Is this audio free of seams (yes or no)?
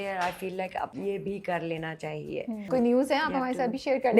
no